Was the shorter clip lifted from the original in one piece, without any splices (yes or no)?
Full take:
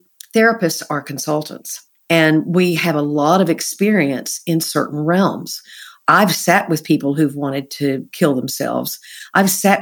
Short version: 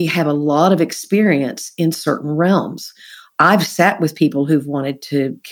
yes